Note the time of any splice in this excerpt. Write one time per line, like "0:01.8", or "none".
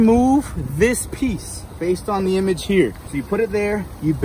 0:03.1